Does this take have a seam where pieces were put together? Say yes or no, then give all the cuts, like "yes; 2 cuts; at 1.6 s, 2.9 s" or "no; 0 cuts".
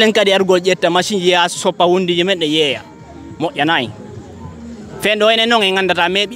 no; 0 cuts